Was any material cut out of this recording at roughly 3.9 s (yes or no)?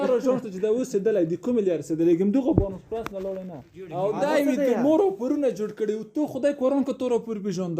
yes